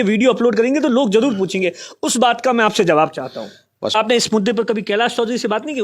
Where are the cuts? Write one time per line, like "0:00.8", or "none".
0:03.9